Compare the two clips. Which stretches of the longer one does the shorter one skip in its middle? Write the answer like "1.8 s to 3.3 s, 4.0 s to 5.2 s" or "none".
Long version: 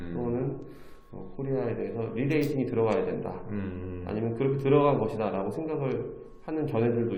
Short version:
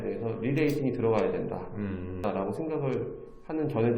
3.9 s to 5.2 s